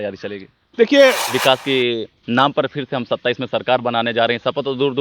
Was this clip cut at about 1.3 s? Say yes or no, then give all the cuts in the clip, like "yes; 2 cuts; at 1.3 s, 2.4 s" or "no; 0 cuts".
yes; 1 cut; at 1.3 s